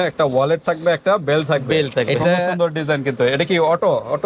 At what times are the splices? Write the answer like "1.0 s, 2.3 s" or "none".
2.1 s